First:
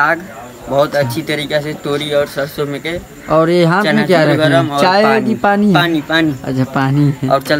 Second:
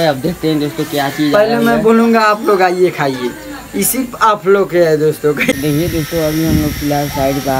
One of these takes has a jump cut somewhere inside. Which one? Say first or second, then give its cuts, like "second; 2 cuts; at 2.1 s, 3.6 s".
second; 1 cut; at 5.5 s